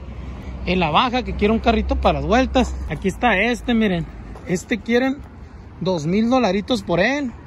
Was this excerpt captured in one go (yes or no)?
no